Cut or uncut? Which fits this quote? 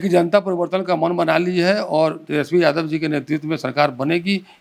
uncut